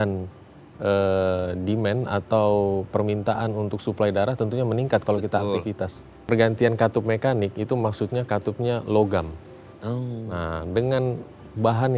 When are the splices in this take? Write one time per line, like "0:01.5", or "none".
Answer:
0:06.1